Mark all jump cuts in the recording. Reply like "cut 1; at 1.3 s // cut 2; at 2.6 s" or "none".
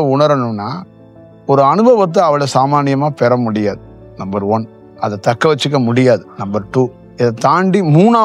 cut 1; at 4.8 s // cut 2; at 7.0 s